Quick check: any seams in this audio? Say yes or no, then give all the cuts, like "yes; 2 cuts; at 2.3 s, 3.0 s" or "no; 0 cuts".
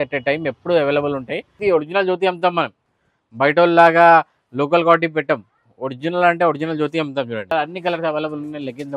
yes; 2 cuts; at 1.6 s, 7.5 s